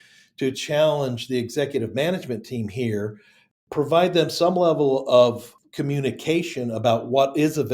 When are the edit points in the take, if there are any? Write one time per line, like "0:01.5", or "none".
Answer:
0:05.5